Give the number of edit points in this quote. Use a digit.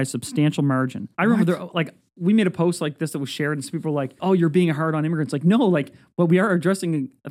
2